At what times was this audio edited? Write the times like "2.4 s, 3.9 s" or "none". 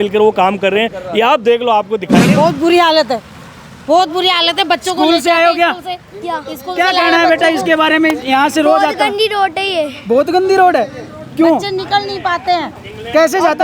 2.3 s

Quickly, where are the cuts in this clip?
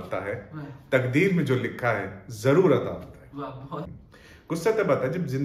3.9 s

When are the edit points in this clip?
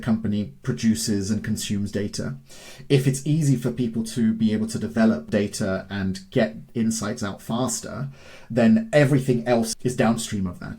5.3 s, 9.7 s

